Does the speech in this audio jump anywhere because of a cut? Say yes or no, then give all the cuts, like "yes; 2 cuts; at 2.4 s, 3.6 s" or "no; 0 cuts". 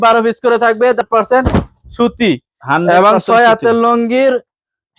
yes; 1 cut; at 1.0 s